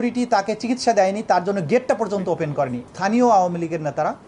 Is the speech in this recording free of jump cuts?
no; 1 cut; at 2.8 s

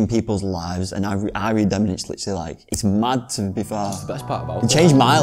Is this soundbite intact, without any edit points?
yes; 0 cuts

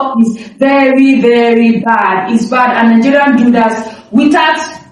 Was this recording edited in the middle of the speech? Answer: no; 0 cuts

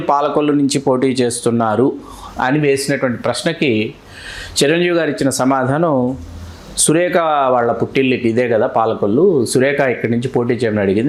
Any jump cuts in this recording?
no; 0 cuts

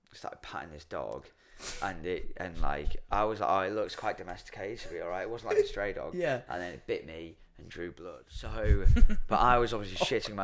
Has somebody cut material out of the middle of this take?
yes; 1 cut; at 8.6 s

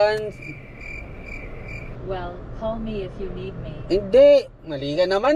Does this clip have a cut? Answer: no; 0 cuts

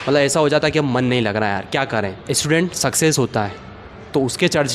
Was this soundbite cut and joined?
yes; 1 cut; at 2.2 s

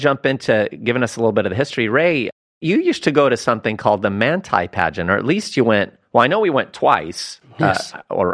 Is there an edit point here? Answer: yes; 1 cut; at 2.6 s

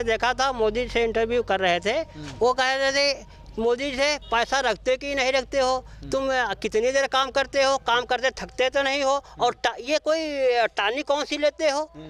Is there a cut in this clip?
no; 0 cuts

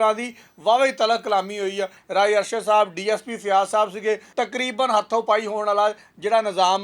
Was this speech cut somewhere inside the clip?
yes; 2 cuts; at 2.0 s, 4.3 s

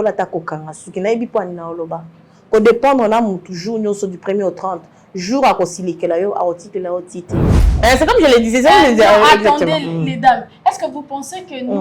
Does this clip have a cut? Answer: yes; 1 cut; at 7.7 s

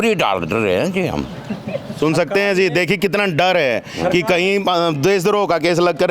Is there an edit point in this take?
no; 0 cuts

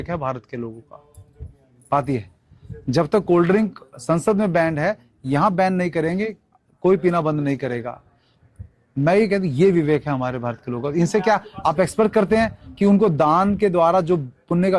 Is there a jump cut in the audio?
no; 0 cuts

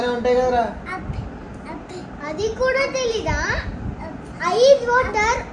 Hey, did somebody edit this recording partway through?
no; 0 cuts

